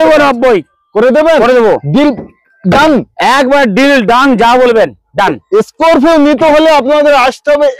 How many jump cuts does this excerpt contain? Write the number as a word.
zero